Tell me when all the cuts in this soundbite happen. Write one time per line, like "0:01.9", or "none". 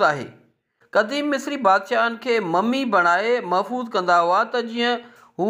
0:01.1